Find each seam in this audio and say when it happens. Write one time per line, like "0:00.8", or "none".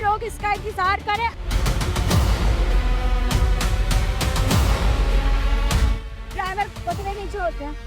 0:01.3